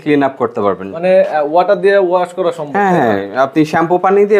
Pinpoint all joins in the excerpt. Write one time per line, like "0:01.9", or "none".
none